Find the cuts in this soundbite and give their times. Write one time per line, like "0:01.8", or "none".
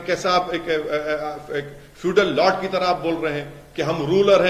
none